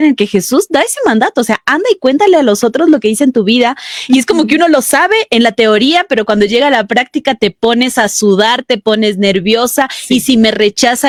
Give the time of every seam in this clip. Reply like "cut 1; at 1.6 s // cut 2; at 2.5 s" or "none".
none